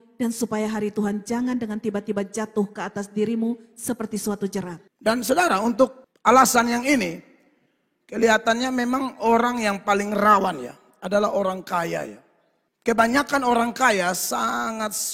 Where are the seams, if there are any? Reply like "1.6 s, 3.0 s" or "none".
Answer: 4.8 s